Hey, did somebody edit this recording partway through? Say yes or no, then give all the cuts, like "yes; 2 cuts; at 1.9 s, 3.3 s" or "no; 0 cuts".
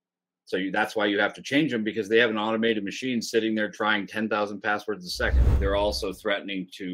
yes; 1 cut; at 5.5 s